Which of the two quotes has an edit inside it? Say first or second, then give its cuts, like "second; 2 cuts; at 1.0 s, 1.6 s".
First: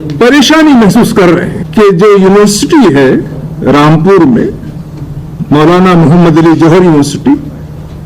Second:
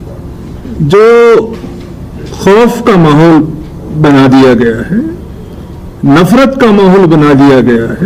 first; 1 cut; at 1.6 s